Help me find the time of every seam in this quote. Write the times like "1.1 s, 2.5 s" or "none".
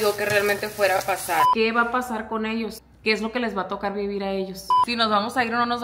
1.5 s, 4.9 s